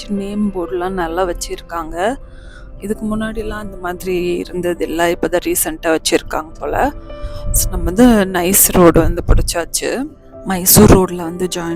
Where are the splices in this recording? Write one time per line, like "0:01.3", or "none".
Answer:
0:10.3